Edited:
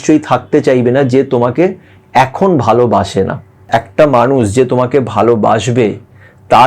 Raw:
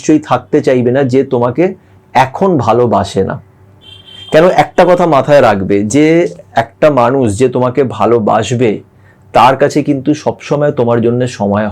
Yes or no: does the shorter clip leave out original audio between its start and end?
yes